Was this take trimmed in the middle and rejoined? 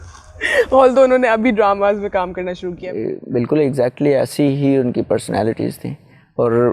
yes; 1 cut; at 2.8 s

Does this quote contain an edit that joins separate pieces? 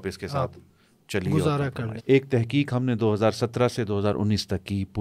yes; 1 cut; at 2.0 s

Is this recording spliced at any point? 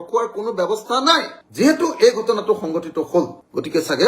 no; 0 cuts

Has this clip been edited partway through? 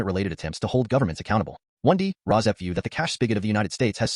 yes; 1 cut; at 1.6 s

